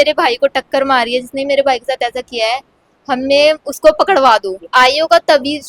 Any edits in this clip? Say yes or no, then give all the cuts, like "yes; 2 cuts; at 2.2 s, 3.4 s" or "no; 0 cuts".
yes; 1 cut; at 4.5 s